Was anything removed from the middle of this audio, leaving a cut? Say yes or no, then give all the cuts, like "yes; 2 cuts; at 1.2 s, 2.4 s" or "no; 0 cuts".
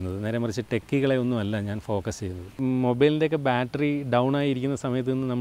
yes; 1 cut; at 2.6 s